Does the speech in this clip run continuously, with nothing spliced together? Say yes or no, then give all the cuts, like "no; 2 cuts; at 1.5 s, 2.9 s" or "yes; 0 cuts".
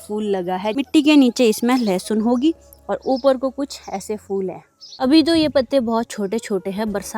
no; 2 cuts; at 0.8 s, 4.6 s